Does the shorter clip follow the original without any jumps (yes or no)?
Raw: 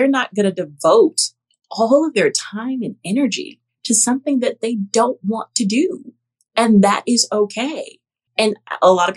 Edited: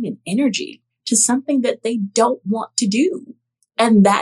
yes